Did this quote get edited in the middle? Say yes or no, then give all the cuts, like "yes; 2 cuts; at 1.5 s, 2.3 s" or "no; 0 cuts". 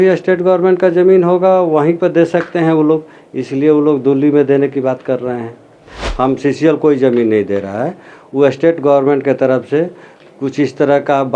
yes; 1 cut; at 6.0 s